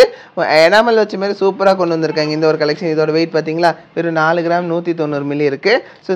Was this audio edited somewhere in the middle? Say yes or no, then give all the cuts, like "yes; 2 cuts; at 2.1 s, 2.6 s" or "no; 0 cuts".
no; 0 cuts